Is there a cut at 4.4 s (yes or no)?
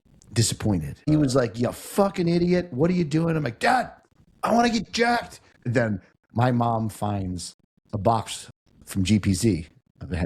no